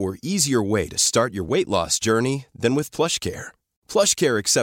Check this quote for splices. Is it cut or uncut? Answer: uncut